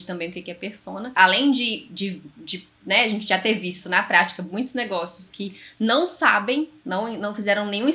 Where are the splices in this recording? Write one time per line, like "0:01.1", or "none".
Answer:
0:01.1